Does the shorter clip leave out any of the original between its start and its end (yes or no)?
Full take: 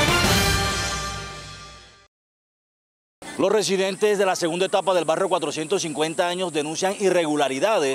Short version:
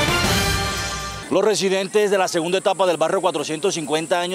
yes